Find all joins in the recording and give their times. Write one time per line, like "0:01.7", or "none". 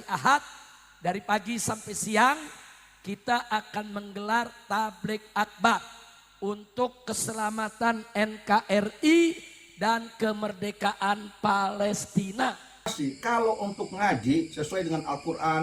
0:12.9